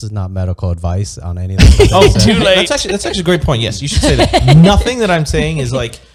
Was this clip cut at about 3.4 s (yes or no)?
no